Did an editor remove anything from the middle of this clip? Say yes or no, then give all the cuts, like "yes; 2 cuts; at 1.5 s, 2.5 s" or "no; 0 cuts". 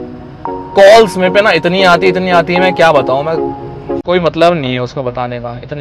no; 0 cuts